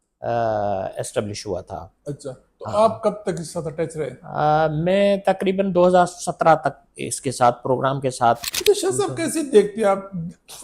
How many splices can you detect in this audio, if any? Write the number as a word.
one